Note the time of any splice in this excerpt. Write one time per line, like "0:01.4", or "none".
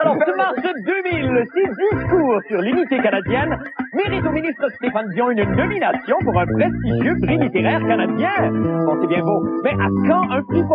none